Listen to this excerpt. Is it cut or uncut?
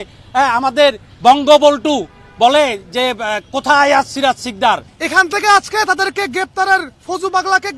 cut